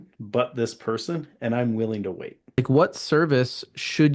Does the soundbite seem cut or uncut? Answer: cut